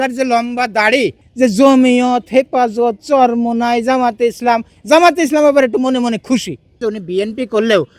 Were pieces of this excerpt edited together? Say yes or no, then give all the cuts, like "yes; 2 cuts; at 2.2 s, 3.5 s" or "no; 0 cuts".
yes; 2 cuts; at 1.2 s, 6.8 s